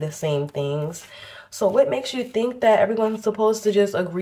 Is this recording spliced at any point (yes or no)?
no